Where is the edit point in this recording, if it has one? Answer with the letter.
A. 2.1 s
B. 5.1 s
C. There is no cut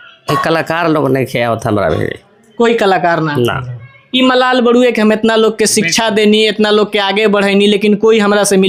C